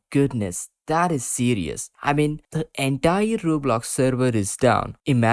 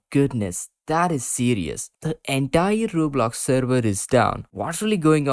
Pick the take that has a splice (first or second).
second